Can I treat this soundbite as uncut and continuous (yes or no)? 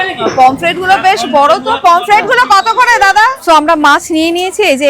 no